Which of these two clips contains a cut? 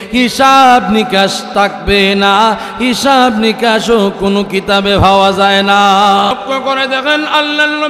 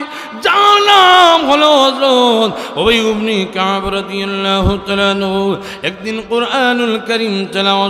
first; 1 cut; at 6.3 s

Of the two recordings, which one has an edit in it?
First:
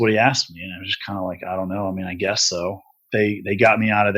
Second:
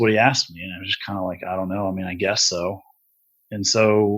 first; 1 cut; at 3.0 s

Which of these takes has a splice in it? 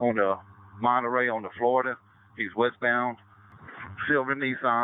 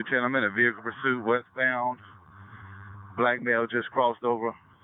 first; 1 cut; at 3.6 s

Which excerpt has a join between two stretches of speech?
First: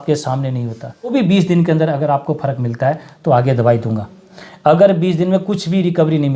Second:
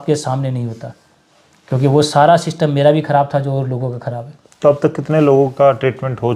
first; 1 cut; at 1.1 s

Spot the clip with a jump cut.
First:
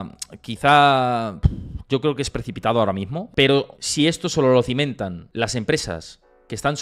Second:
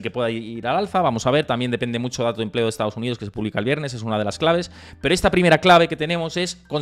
first; 3 cuts; at 3.2 s, 3.8 s, 5.2 s

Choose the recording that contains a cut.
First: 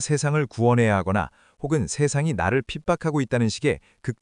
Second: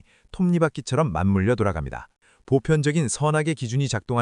second; 1 cut; at 2.3 s

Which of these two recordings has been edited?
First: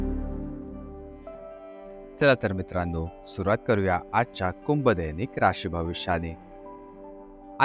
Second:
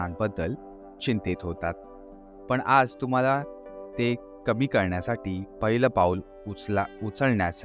first; 1 cut; at 1.4 s

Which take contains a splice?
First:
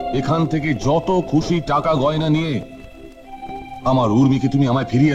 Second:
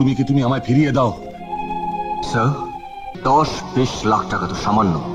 second; 1 cut; at 3.1 s

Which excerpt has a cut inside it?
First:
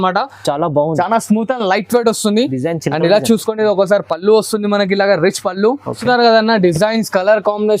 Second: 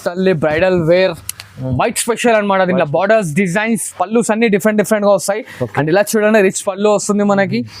first; 1 cut; at 6.0 s

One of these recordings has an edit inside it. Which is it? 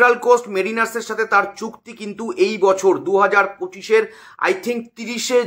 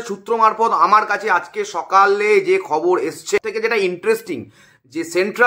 second; 1 cut; at 3.4 s

